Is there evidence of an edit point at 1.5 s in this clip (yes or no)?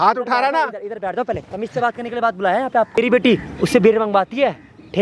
no